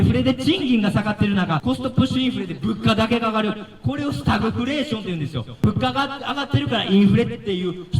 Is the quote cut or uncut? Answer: cut